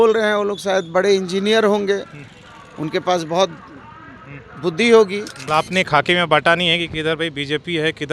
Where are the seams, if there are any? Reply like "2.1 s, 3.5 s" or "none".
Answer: 5.4 s